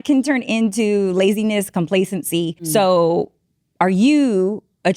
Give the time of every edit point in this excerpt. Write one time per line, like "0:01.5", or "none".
0:02.6